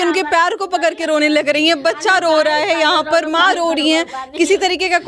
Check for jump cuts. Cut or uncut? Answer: uncut